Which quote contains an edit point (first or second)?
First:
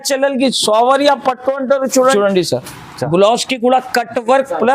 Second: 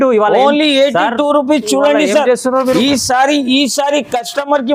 first